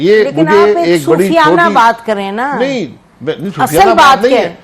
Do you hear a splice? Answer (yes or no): no